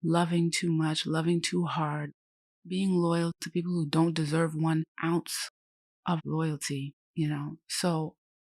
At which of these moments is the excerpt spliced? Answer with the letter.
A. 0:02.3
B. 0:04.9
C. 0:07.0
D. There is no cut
C